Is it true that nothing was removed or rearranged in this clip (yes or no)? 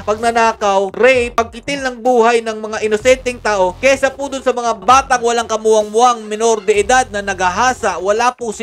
yes